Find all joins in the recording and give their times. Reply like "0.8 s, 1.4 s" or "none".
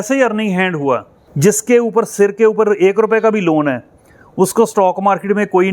1.2 s